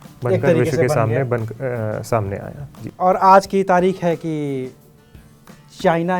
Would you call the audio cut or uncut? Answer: uncut